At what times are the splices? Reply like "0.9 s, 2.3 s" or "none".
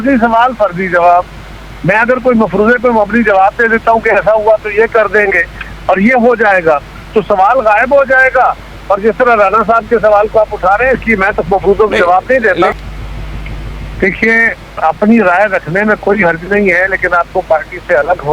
12.7 s